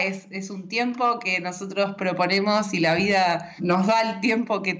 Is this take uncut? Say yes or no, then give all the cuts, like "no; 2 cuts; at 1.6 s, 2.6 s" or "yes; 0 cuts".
no; 1 cut; at 3.6 s